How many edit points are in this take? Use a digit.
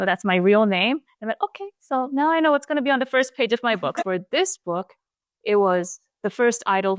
1